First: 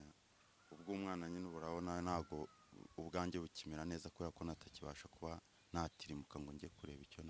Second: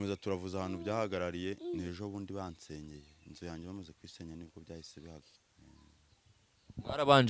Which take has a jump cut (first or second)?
second